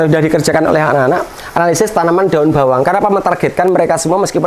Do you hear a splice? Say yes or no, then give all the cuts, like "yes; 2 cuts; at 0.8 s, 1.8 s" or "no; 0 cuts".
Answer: no; 0 cuts